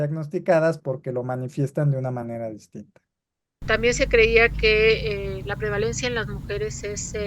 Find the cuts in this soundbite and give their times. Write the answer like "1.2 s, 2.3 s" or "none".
3.6 s